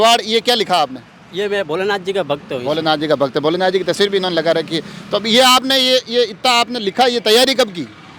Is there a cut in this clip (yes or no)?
no